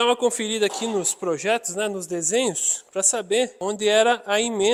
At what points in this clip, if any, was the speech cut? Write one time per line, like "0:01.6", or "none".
none